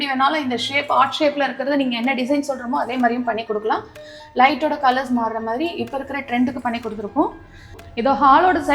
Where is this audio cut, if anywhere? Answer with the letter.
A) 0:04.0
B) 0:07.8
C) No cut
B